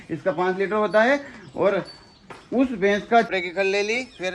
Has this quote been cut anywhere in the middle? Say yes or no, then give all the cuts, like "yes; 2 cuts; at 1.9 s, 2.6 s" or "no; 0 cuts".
yes; 1 cut; at 3.3 s